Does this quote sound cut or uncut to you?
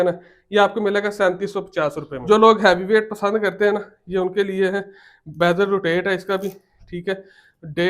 cut